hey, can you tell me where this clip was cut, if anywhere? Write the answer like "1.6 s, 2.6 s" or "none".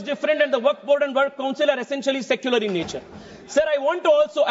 none